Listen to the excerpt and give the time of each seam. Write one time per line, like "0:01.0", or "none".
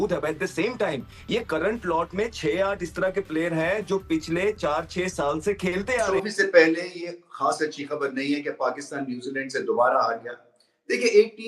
0:06.1